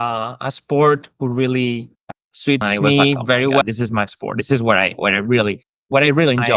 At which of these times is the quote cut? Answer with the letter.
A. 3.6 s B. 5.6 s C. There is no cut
A